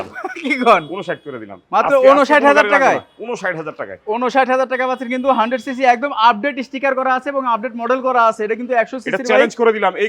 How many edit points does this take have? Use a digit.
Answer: 0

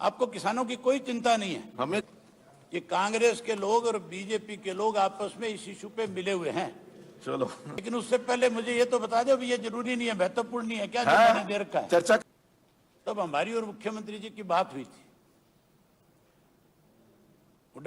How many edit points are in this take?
3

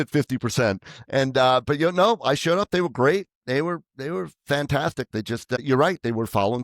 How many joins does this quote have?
1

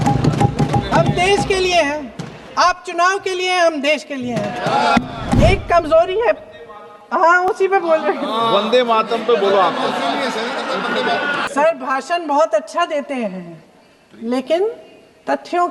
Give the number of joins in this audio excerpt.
2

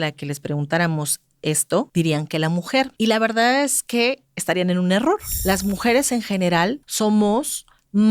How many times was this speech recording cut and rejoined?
4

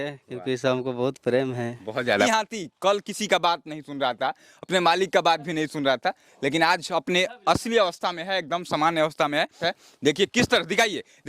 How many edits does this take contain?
2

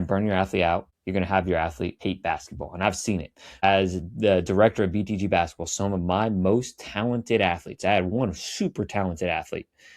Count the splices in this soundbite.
2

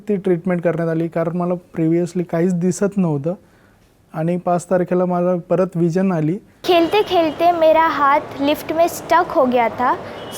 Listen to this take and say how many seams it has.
1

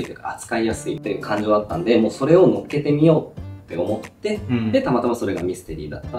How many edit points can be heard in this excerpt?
1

